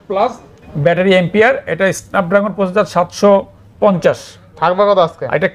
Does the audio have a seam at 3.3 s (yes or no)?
no